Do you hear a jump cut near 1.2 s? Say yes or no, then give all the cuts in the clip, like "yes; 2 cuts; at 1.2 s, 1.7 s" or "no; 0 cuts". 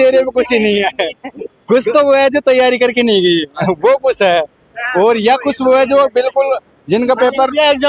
no; 0 cuts